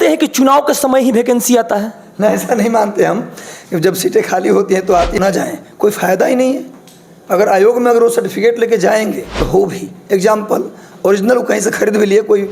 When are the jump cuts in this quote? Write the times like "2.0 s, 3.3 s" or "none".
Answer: 5.2 s, 9.4 s

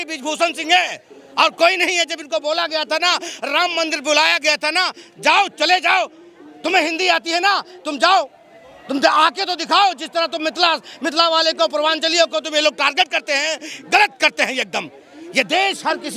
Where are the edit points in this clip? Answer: none

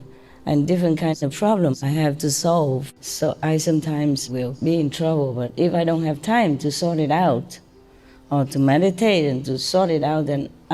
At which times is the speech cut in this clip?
2.9 s

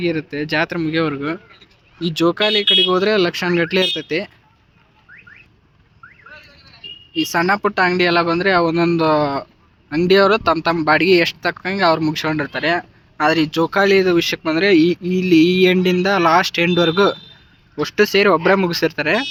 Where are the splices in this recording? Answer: none

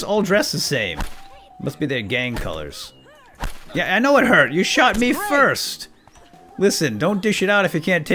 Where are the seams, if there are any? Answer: none

